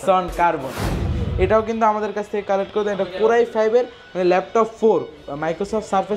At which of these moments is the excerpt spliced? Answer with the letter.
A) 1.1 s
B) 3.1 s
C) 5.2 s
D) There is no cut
A